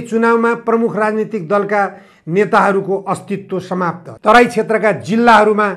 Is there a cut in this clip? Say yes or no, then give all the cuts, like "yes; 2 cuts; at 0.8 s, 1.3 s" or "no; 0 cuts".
yes; 1 cut; at 4.1 s